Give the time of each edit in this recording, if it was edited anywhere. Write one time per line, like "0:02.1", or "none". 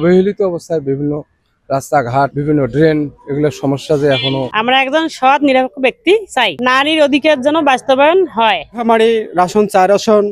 0:02.4
0:04.5
0:06.5